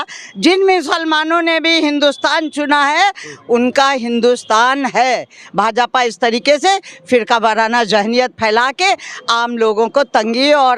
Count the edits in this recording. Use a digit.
0